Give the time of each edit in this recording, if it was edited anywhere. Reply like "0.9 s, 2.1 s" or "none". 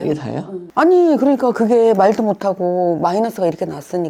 none